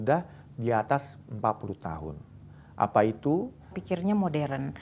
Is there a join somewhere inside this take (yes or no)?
yes